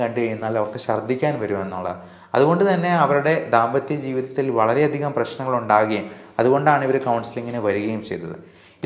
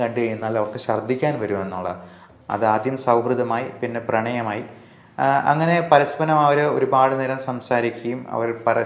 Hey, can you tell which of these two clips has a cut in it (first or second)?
second